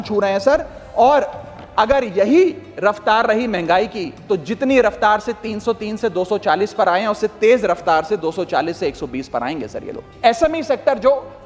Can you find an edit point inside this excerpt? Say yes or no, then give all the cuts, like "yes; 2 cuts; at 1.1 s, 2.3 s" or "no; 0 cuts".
yes; 1 cut; at 10.0 s